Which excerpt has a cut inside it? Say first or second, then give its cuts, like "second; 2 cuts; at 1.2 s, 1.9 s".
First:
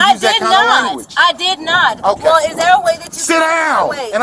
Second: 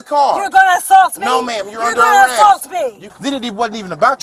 second; 1 cut; at 3.1 s